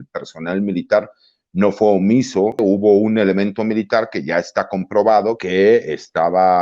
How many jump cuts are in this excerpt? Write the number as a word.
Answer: two